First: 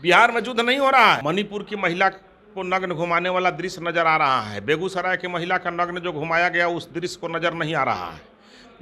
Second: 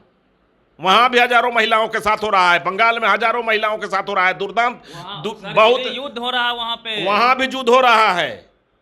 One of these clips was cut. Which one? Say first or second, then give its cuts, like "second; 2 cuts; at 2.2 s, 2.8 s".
first; 1 cut; at 1.2 s